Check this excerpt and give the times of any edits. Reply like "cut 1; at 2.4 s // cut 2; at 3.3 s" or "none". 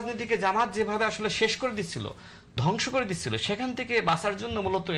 none